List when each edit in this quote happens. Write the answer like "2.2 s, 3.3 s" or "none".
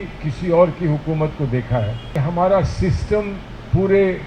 2.1 s